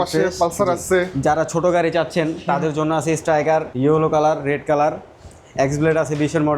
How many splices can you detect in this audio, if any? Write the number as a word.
two